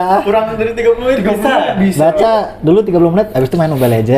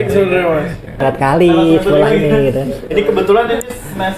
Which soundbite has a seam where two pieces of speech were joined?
second; 1 cut; at 1.0 s

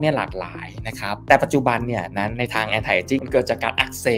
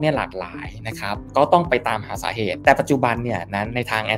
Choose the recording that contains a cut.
first; 1 cut; at 1.2 s

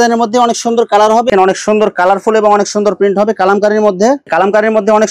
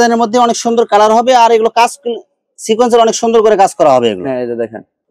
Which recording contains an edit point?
first; 2 cuts; at 1.3 s, 4.2 s

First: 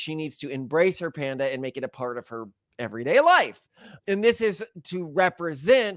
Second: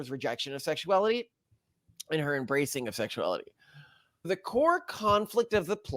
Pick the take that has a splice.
second; 1 cut; at 4.3 s

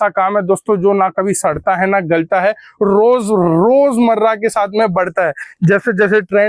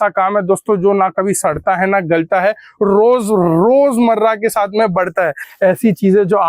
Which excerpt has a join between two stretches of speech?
second; 1 cut; at 5.4 s

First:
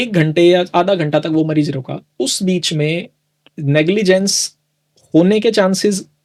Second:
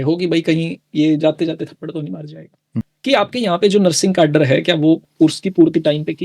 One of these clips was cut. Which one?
second; 2 cuts; at 2.6 s, 5.1 s

